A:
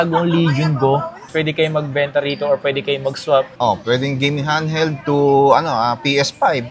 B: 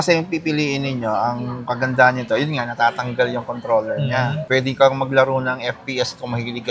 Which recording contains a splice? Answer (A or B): A